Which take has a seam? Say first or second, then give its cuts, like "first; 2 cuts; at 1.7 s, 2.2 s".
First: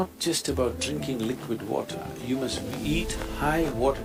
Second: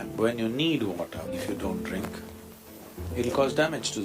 second; 1 cut; at 1.3 s